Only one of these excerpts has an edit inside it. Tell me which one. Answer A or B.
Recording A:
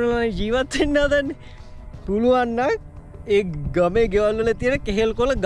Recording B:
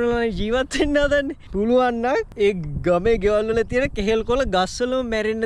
B